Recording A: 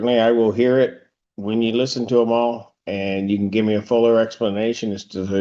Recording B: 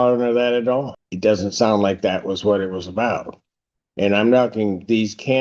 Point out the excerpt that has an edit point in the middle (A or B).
B